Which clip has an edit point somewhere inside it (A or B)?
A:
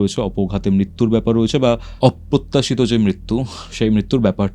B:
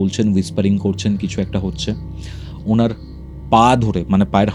A